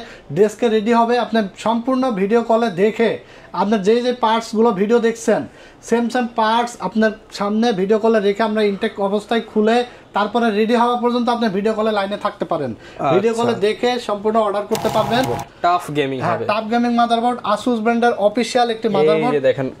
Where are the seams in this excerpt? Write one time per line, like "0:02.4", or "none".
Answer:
0:15.4